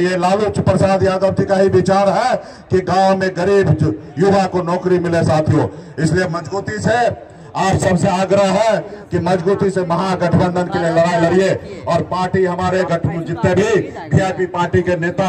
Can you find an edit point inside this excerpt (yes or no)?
no